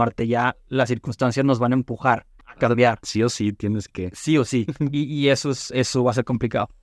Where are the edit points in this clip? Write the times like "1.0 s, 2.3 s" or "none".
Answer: 2.4 s